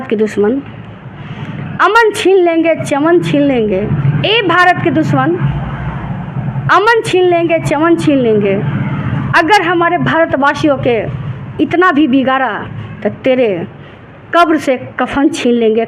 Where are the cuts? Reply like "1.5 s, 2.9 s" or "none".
none

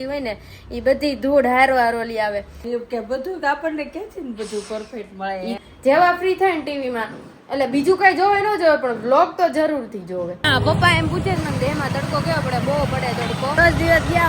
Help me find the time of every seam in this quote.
2.6 s, 5.6 s, 10.4 s, 13.6 s

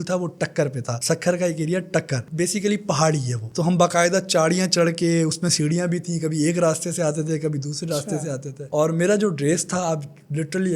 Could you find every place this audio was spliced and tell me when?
none

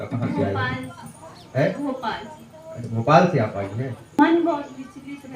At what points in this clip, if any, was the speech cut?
4.2 s

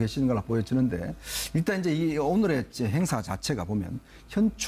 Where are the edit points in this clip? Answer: 1.2 s

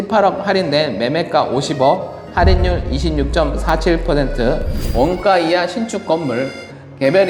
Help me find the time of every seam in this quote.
4.8 s

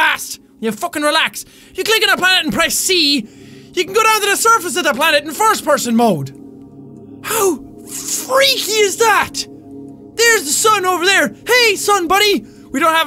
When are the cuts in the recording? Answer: 11.4 s

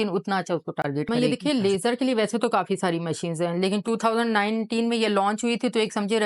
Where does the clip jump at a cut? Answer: 1.1 s

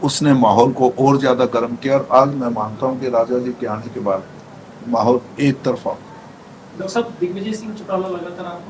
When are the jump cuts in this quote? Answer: none

